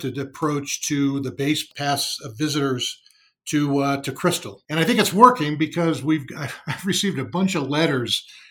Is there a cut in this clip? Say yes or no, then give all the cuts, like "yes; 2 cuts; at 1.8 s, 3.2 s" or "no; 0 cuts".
yes; 2 cuts; at 1.7 s, 4.5 s